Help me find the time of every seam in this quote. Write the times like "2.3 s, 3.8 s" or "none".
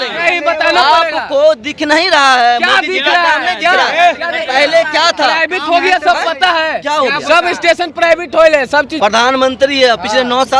8.9 s